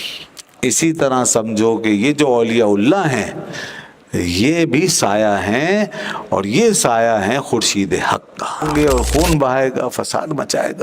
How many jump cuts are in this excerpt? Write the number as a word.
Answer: one